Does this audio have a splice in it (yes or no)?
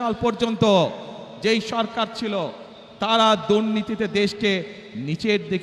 no